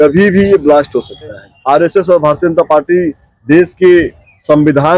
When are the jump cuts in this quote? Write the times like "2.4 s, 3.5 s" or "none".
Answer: 1.5 s